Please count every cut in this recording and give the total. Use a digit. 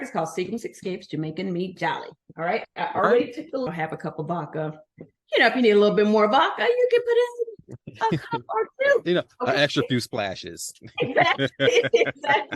1